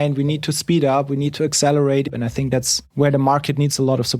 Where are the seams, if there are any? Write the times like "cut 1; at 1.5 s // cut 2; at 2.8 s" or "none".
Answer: cut 1; at 2.8 s

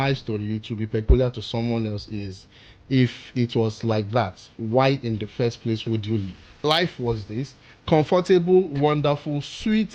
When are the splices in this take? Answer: cut 1; at 6.6 s

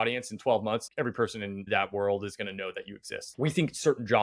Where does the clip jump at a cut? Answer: cut 1; at 1.3 s // cut 2; at 3.2 s

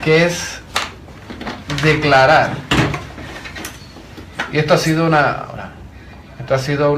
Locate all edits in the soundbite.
cut 1; at 2.3 s

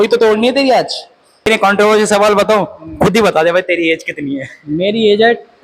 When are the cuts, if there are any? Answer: cut 1; at 1.5 s

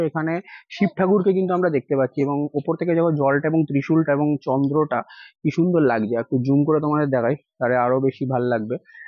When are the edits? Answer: none

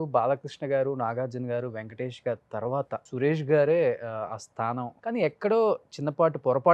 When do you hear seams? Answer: cut 1; at 3.1 s // cut 2; at 4.9 s

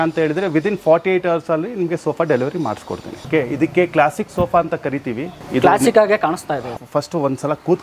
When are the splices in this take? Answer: cut 1; at 3.2 s // cut 2; at 5.3 s // cut 3; at 6.7 s

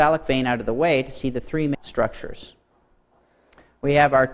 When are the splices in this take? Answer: none

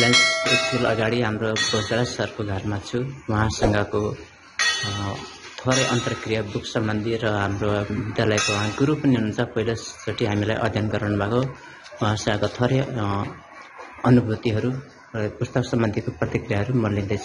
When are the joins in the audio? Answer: none

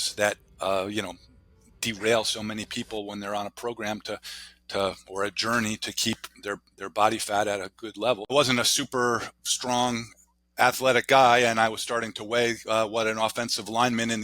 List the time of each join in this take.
cut 1; at 8.3 s

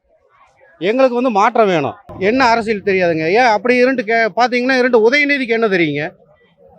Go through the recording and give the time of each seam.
cut 1; at 2.0 s

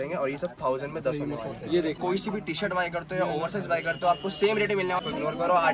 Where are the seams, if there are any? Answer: cut 1; at 2.0 s // cut 2; at 5.0 s

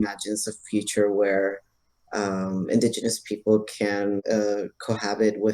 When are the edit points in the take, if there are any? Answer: cut 1; at 4.2 s

